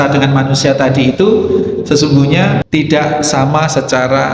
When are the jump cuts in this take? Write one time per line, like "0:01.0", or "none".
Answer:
0:02.6